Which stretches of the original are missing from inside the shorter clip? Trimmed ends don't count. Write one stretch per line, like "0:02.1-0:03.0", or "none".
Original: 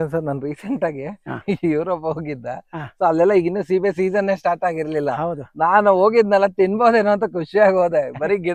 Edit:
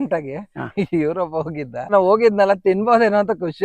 0:02.6-0:05.8

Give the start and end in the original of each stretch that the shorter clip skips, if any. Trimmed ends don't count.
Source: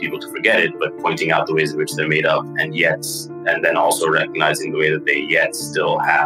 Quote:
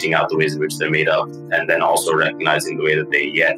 0:02.5-0:03.3

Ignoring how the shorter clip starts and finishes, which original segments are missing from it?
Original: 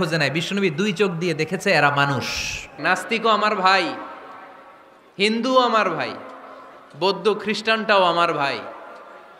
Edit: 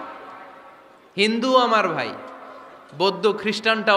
none

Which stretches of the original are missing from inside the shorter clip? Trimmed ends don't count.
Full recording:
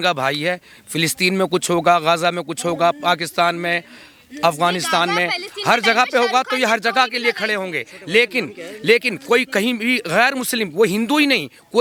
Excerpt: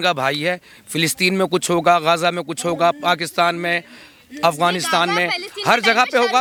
none

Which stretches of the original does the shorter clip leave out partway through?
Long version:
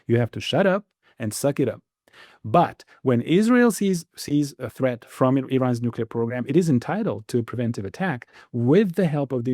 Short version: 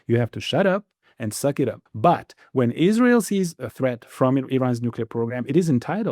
0:01.8-0:02.3
0:04.1-0:04.6

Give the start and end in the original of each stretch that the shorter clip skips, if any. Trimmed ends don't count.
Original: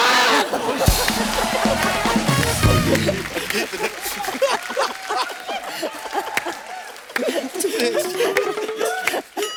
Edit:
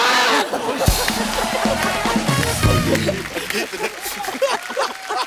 none

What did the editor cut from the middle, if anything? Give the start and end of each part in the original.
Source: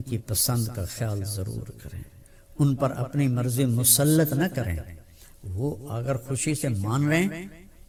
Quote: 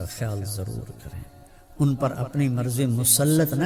none

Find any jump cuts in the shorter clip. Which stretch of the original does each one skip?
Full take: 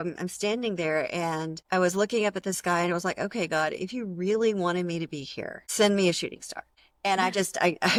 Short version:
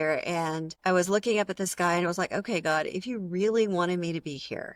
none

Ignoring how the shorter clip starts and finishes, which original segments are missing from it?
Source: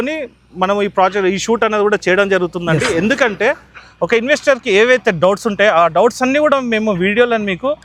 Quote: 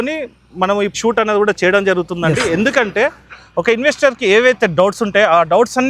0:00.9-0:01.4

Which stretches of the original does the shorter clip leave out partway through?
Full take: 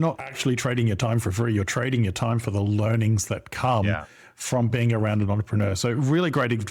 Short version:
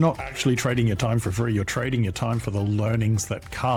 none

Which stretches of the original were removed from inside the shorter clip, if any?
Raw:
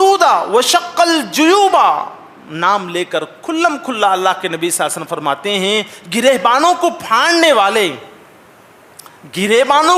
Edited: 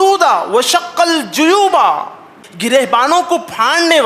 0:02.4-0:06.0

